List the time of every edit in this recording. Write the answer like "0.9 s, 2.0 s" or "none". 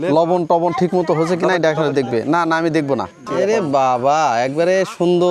3.2 s